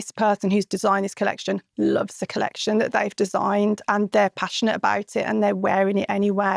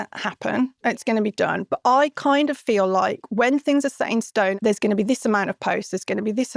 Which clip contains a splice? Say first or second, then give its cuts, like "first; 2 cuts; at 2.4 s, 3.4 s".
second; 1 cut; at 4.6 s